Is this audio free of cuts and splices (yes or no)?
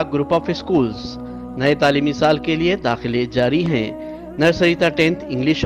yes